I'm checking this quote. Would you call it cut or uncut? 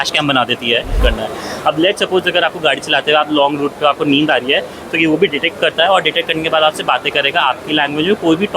cut